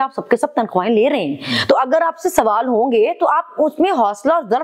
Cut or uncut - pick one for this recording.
uncut